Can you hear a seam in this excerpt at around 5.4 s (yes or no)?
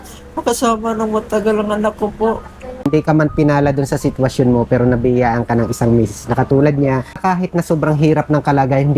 no